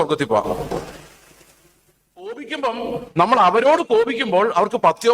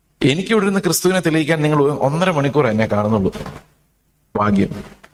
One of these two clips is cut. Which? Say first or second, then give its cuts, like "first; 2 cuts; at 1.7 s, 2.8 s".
first; 1 cut; at 2.4 s